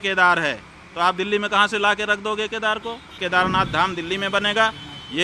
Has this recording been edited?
yes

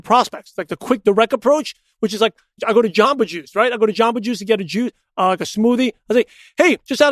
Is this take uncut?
no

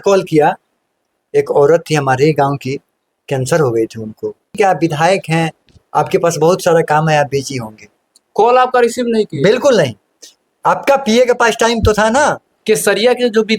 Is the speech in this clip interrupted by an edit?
yes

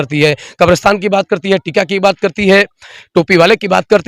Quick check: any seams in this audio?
no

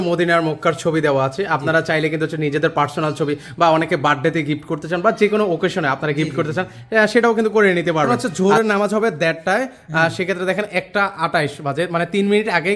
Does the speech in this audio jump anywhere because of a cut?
yes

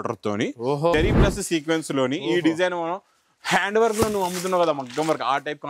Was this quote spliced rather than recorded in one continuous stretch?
yes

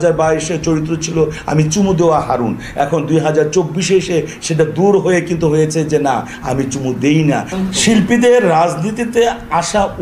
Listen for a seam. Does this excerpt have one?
yes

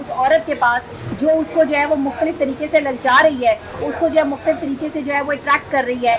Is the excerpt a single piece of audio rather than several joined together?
yes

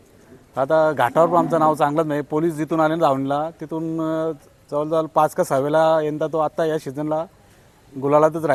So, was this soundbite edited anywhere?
no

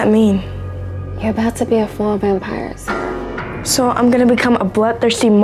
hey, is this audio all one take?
yes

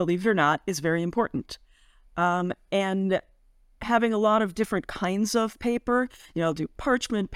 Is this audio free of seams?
yes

